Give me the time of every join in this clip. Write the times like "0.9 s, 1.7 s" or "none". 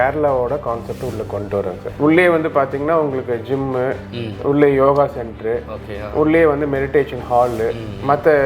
1.8 s